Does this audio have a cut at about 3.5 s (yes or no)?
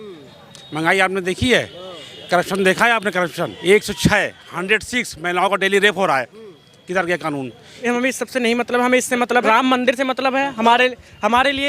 yes